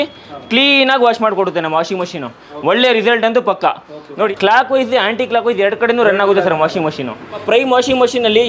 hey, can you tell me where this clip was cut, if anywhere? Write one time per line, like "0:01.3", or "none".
0:04.3
0:07.4